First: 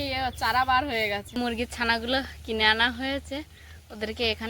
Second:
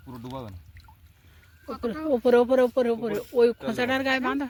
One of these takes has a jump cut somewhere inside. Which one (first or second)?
first